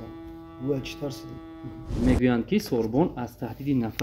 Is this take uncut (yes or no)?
no